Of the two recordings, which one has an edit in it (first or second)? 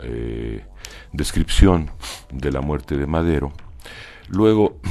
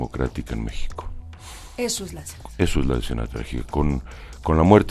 second